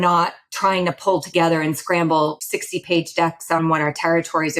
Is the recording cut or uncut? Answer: cut